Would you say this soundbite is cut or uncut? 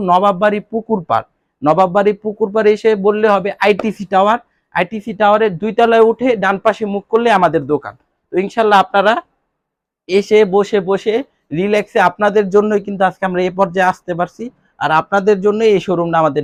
uncut